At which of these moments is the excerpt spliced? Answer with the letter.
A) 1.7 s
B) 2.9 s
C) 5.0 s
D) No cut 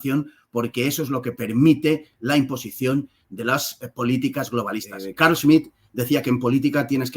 C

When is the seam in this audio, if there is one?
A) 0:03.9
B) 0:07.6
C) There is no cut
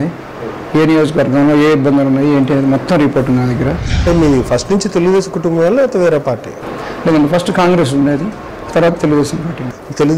A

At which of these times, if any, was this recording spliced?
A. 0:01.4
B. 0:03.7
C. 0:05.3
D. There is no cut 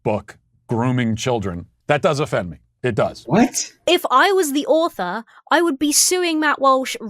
B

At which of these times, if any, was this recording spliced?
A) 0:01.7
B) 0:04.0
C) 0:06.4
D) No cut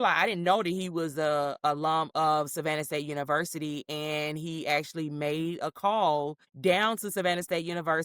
C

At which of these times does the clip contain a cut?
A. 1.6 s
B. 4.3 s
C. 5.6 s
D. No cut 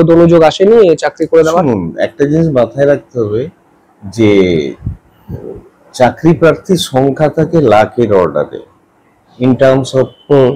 D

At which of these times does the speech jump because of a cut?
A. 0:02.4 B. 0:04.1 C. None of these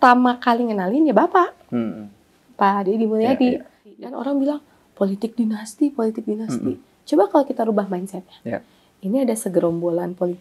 B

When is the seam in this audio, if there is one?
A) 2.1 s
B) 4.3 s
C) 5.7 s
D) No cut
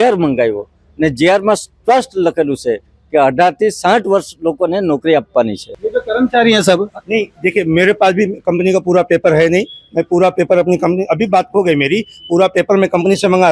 C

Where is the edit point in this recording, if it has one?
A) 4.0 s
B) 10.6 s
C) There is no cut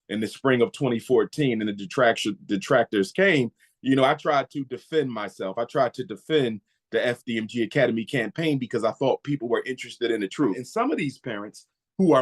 B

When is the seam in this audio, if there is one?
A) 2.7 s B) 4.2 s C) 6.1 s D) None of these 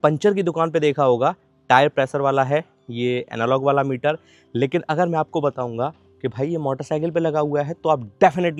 D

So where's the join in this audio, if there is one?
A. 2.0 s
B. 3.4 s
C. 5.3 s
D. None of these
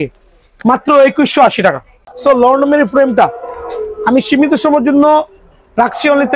A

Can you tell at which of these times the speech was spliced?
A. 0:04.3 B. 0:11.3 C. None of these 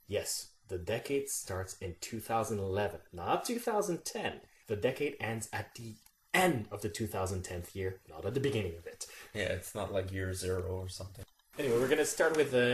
C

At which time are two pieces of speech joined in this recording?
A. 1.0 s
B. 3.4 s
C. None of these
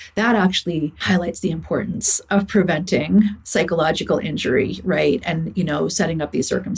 A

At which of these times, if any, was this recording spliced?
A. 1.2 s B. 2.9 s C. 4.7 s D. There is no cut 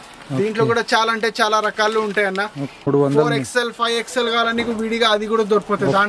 B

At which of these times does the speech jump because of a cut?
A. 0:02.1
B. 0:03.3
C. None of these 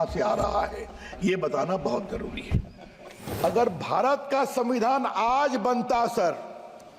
B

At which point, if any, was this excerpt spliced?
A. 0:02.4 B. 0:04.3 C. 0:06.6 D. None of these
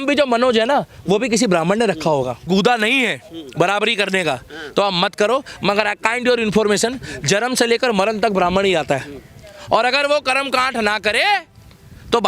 A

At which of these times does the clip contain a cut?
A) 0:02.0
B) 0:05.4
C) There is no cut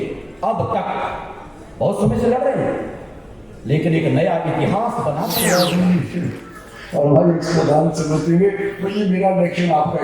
B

